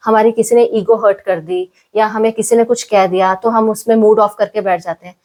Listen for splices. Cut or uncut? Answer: uncut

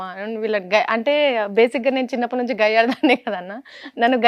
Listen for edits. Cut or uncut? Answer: uncut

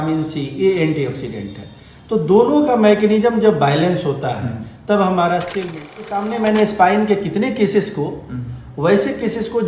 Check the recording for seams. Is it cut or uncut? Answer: cut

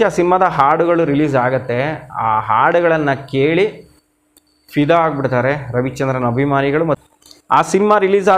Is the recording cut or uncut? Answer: cut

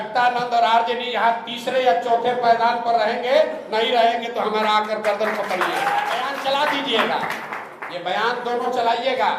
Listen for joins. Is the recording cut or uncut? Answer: cut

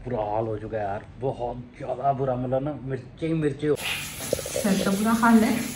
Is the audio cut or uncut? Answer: cut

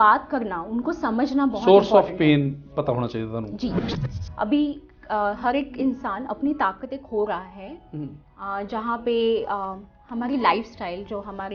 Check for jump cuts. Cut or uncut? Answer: cut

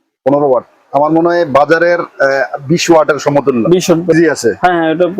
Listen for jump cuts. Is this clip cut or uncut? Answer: cut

